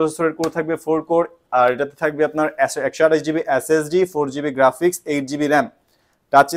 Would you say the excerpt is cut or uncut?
uncut